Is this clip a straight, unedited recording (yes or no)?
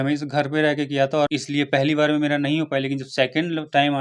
no